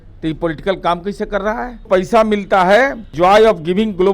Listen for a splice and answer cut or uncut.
cut